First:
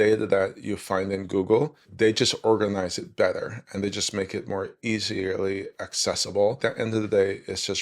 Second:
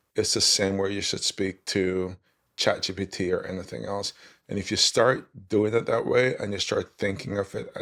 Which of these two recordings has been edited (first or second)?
first